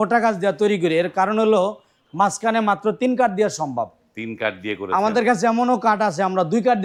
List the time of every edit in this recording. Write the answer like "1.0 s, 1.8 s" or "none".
none